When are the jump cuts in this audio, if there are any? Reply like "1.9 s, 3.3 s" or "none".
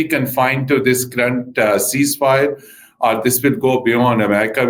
none